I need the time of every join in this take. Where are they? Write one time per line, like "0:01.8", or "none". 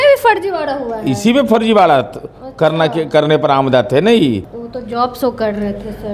0:04.5